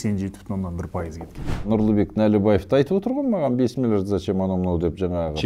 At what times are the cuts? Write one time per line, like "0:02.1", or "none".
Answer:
0:01.7